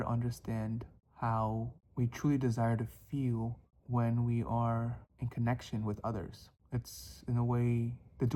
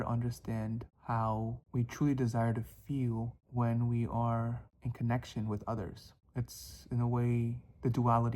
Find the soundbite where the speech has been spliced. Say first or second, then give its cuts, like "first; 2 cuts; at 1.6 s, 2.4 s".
second; 3 cuts; at 0.9 s, 1.6 s, 3.4 s